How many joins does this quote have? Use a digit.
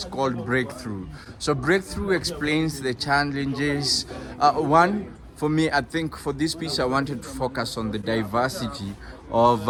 0